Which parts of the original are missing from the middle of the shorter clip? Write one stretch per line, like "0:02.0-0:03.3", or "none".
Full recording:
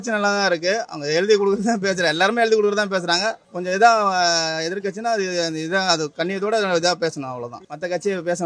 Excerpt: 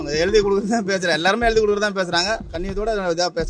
0:03.5-0:06.2